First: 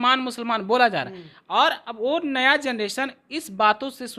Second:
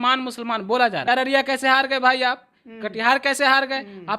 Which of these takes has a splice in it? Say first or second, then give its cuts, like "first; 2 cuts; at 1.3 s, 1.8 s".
second; 1 cut; at 1.0 s